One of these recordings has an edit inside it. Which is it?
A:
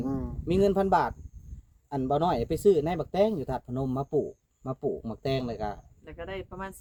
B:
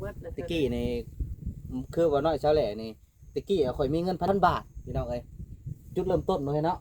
B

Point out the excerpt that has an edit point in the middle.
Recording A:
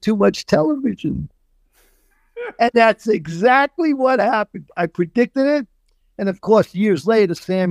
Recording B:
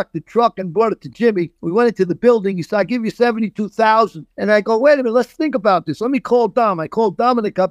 B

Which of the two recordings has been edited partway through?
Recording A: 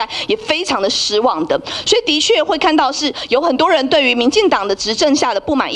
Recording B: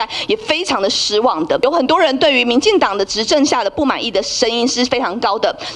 B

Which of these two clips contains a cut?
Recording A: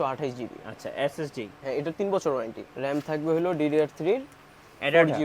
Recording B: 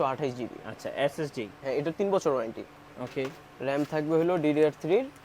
A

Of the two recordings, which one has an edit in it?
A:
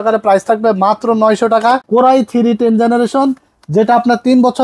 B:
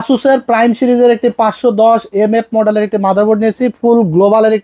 A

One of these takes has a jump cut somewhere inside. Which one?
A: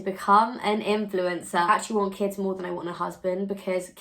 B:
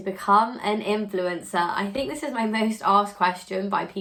A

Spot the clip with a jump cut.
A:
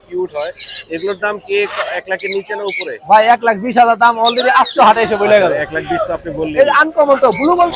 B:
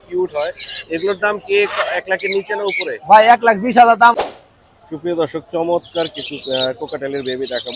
B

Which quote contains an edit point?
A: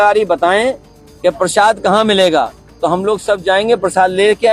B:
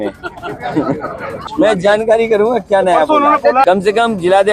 B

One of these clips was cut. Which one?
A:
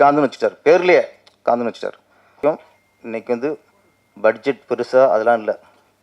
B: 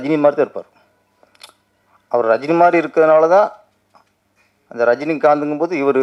A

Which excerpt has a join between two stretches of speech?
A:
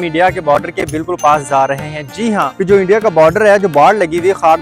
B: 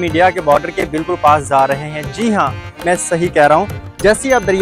A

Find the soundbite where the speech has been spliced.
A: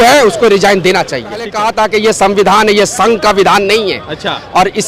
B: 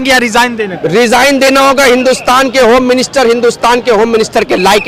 A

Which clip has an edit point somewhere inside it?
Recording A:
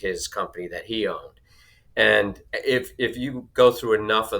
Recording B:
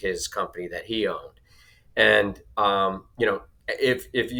A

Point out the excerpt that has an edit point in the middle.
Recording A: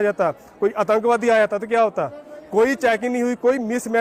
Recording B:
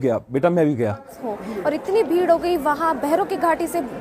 B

